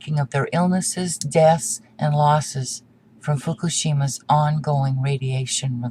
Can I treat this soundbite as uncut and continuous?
no; 1 cut; at 2.8 s

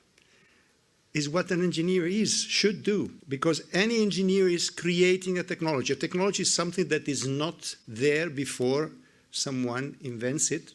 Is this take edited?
yes; 1 cut; at 3.2 s

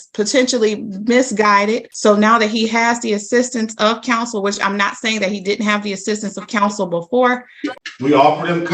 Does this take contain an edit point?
yes; 2 cuts; at 1.9 s, 7.6 s

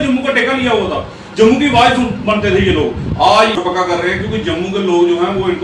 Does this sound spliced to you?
yes; 1 cut; at 3.6 s

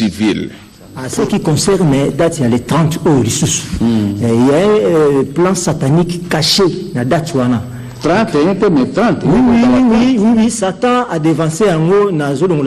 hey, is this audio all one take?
no; 1 cut; at 1.0 s

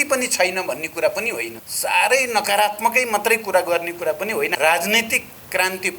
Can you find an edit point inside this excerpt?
yes; 2 cuts; at 1.6 s, 4.5 s

